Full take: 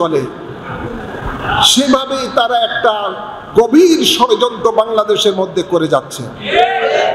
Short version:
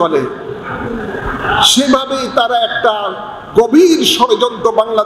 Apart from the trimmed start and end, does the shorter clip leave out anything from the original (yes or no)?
no